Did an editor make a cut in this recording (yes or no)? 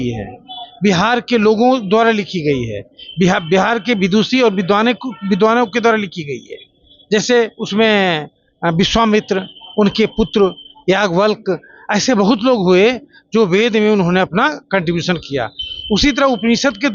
no